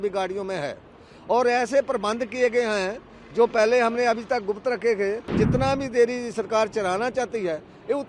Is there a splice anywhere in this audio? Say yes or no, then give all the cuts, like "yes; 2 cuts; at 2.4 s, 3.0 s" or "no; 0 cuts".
yes; 1 cut; at 5.3 s